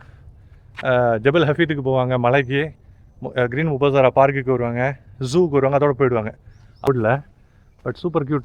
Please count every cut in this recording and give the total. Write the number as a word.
one